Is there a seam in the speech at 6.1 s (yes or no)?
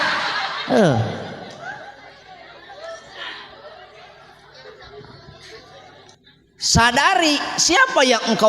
yes